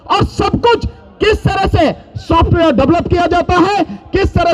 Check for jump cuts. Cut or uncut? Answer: uncut